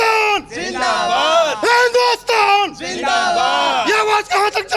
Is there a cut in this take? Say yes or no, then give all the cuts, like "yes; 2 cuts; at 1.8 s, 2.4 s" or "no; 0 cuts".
no; 0 cuts